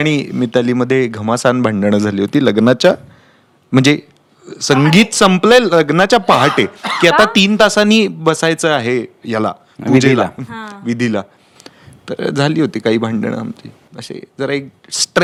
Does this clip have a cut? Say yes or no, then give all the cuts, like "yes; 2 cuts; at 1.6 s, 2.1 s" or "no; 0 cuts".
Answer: no; 0 cuts